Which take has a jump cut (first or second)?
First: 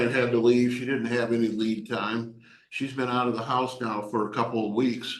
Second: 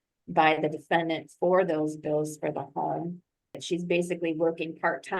second